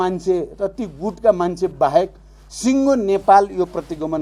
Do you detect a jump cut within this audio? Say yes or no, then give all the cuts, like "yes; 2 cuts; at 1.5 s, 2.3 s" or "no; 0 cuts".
no; 0 cuts